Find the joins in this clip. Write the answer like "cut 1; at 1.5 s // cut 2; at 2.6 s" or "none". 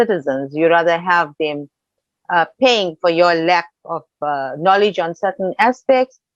none